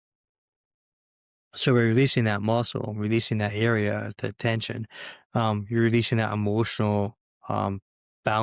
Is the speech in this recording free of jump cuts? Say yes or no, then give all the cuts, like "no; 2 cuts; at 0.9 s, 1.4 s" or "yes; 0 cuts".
yes; 0 cuts